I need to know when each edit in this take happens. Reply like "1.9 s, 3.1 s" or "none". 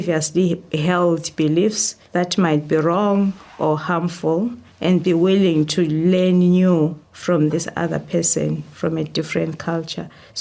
none